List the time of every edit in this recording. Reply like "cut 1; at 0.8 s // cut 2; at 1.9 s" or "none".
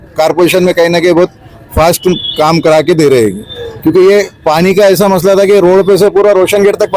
none